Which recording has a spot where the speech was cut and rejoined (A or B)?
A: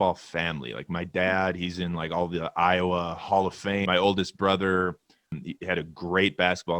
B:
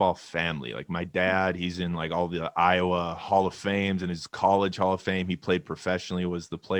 A